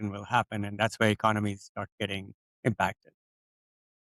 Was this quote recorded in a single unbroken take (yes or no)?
yes